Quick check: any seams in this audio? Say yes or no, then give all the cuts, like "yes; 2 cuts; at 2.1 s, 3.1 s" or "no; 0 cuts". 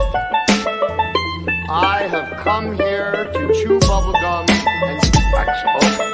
yes; 1 cut; at 1.1 s